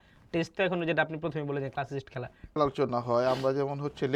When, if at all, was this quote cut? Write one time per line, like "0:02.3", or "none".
0:02.6